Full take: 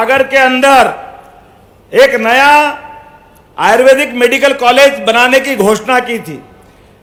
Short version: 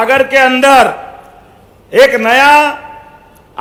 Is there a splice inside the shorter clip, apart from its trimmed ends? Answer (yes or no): no